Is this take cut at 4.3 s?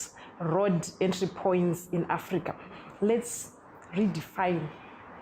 no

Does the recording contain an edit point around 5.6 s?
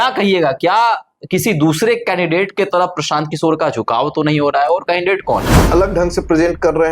yes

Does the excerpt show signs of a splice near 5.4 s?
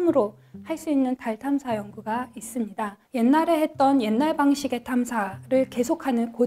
no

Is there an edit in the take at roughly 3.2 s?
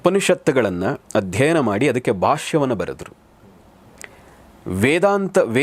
no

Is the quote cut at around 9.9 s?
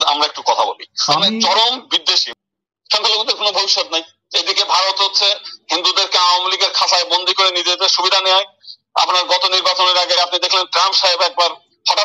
no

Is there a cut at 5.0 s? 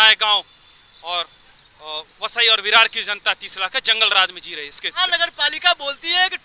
yes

